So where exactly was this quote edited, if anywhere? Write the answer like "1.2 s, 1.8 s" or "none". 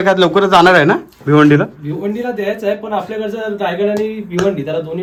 none